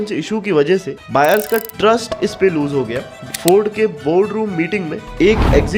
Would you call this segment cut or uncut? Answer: cut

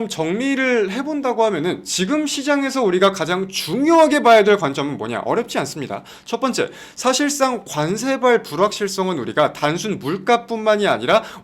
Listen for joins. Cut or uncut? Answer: uncut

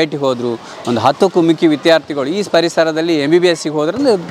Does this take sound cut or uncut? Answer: uncut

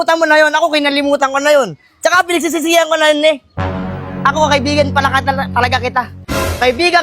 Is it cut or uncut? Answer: uncut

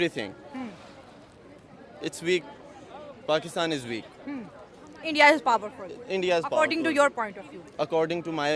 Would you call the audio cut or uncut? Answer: uncut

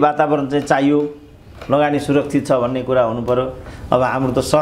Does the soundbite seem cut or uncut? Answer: uncut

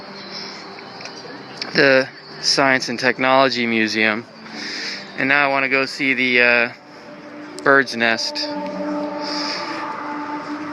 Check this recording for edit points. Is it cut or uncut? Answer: uncut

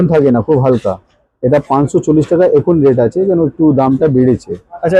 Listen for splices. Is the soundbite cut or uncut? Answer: uncut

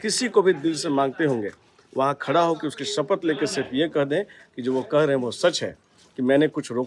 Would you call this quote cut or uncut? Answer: uncut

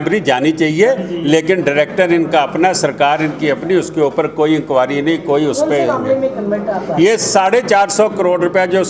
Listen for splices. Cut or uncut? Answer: uncut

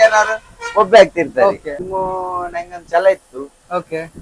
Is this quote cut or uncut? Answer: cut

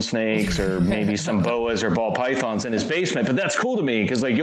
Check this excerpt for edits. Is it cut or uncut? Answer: uncut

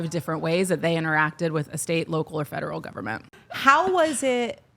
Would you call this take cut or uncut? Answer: cut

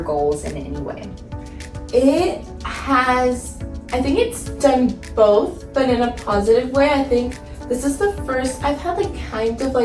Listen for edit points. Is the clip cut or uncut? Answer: uncut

